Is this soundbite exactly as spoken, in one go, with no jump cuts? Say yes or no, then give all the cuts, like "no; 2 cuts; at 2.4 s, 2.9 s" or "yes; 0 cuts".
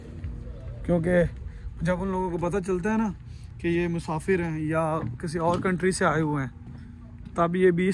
yes; 0 cuts